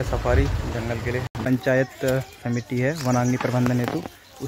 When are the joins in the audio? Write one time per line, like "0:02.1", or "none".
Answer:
0:01.4